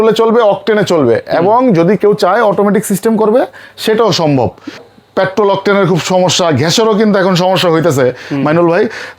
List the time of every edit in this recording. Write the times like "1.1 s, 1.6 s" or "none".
4.9 s